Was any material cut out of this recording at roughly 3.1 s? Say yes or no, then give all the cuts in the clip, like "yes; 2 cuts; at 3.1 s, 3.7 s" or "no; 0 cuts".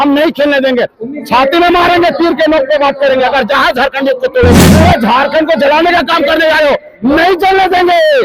no; 1 cut; at 4.7 s